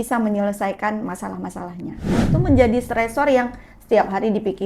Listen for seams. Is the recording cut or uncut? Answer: cut